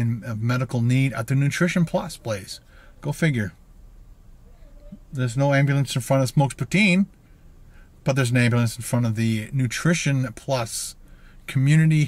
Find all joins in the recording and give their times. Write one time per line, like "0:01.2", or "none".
0:01.2